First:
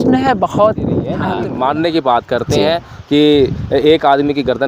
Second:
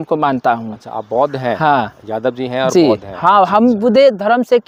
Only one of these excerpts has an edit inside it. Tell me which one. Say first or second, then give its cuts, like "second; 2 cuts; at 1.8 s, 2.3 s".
first; 1 cut; at 1.2 s